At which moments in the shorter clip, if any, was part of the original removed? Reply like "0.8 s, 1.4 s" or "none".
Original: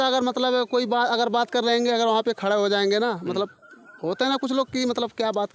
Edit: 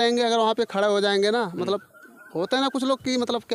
none